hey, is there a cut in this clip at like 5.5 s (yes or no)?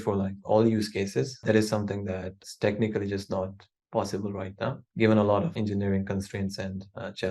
yes